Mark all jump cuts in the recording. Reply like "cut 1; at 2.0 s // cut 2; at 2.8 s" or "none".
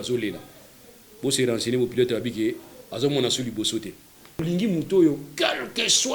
cut 1; at 4.4 s